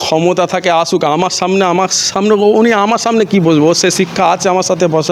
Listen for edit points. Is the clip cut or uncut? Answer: uncut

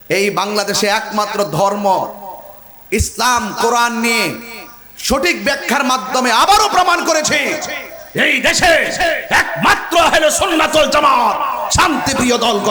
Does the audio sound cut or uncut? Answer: uncut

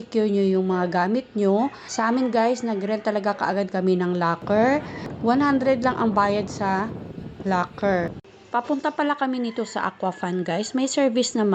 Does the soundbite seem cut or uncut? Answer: cut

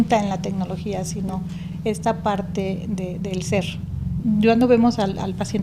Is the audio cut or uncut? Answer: cut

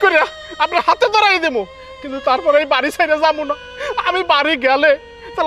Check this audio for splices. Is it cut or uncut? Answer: uncut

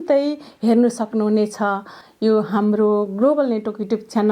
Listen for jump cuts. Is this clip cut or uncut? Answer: cut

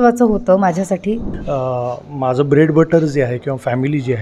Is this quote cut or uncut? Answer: cut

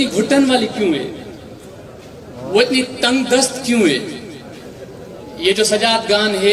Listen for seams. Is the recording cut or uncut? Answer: uncut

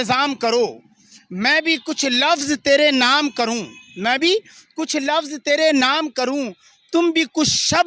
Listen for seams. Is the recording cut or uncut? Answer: uncut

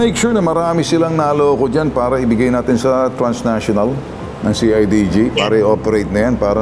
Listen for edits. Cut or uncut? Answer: uncut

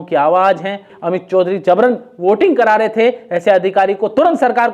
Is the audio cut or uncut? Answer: cut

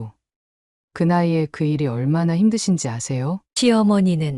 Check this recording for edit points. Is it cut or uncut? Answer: uncut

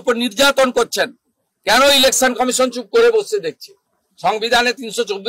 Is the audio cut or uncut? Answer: uncut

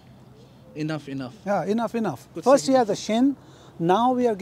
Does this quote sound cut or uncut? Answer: cut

